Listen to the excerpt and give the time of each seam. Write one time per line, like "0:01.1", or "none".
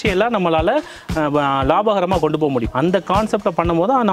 0:02.7